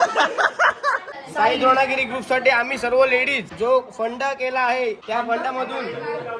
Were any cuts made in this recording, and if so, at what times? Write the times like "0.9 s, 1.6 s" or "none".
1.2 s, 3.4 s, 5.0 s